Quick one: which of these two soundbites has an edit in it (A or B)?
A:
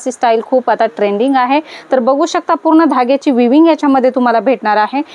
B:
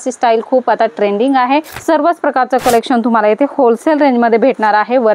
B